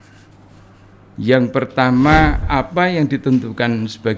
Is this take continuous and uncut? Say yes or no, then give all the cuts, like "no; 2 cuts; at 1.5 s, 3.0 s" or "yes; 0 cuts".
no; 1 cut; at 2.4 s